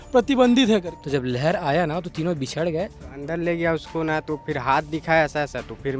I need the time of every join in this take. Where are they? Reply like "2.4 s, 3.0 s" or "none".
1.0 s, 3.2 s